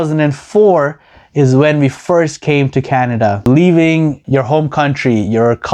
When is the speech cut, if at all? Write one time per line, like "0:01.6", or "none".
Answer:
0:03.4
0:04.2

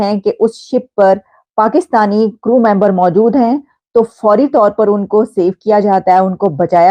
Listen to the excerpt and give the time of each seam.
none

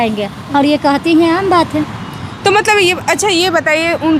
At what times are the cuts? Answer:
none

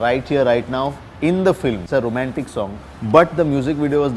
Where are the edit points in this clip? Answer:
0:01.8

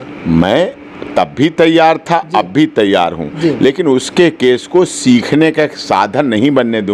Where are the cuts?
none

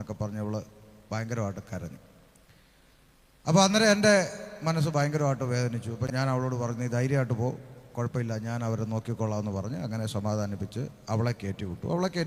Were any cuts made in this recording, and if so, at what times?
none

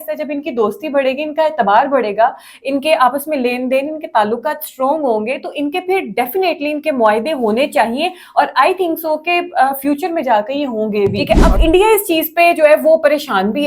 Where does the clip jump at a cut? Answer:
0:11.2

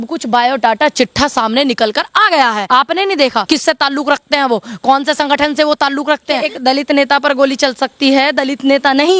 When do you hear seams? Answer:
0:02.6
0:03.5
0:06.5

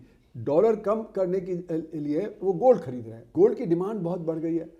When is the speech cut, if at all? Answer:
0:03.2

